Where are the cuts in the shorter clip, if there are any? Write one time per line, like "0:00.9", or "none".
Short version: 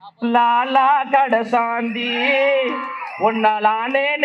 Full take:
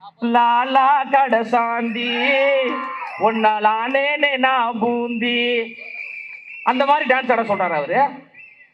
none